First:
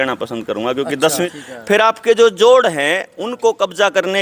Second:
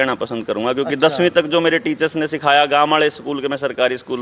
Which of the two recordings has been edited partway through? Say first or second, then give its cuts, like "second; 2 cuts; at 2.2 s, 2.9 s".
first; 1 cut; at 1.3 s